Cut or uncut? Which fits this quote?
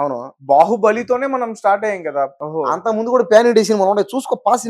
cut